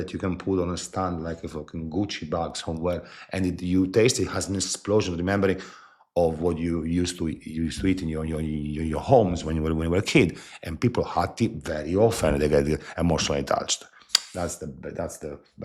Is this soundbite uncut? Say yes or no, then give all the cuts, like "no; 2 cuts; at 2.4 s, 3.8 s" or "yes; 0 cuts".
yes; 0 cuts